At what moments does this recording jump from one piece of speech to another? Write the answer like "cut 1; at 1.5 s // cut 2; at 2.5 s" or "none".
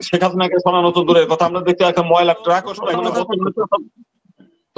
cut 1; at 2.8 s

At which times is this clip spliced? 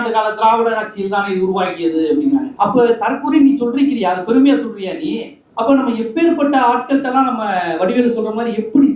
cut 1; at 5.4 s

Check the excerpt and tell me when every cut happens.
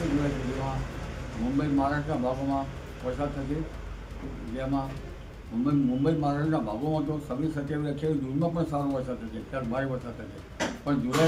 none

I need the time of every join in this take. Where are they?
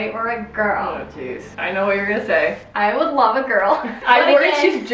none

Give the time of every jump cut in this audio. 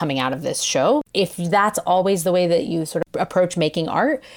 cut 1; at 1.1 s // cut 2; at 3.0 s

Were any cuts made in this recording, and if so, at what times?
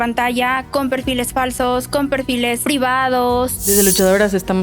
cut 1; at 2.6 s // cut 2; at 3.6 s

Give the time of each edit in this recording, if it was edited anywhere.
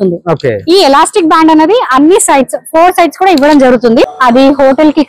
cut 1; at 4.1 s

